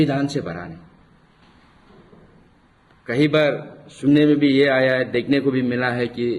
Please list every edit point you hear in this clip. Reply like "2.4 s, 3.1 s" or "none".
1.7 s